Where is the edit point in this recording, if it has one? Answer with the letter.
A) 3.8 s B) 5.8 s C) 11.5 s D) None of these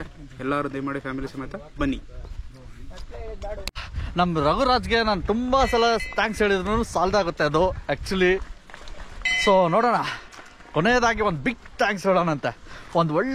A